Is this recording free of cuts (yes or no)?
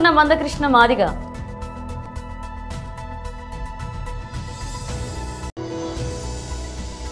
no